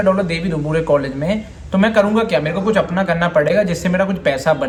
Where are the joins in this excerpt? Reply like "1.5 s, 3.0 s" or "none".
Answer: none